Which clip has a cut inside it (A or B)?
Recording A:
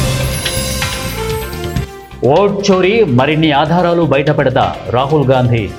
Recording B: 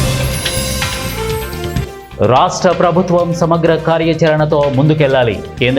B